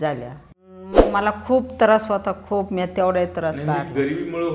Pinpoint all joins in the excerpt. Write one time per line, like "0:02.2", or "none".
0:01.0